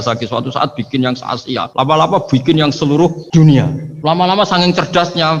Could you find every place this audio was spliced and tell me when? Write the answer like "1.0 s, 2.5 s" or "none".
1.7 s, 3.2 s, 3.8 s